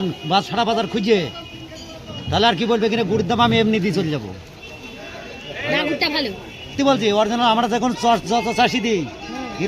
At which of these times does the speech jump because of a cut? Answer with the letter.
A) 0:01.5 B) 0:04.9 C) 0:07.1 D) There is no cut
D